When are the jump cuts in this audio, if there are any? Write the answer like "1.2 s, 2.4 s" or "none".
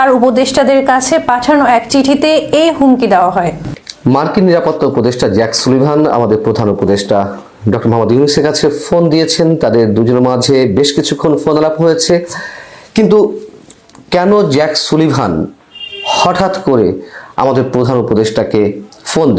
3.8 s